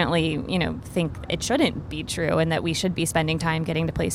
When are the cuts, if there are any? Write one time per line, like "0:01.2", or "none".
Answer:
none

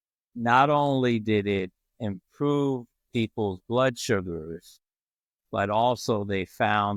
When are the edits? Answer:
none

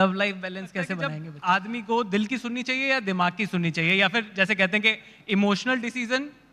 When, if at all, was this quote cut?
0:01.3

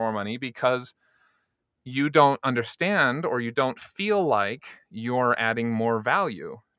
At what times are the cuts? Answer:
none

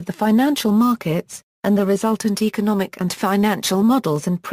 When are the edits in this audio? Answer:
0:03.2

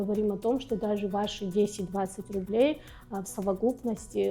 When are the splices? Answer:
none

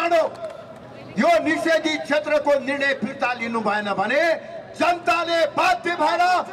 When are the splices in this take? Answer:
none

